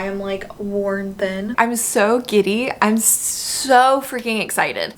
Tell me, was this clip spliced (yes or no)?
yes